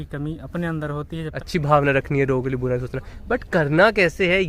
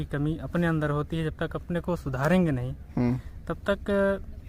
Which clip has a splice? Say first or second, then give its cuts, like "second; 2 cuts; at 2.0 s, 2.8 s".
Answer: first; 1 cut; at 1.4 s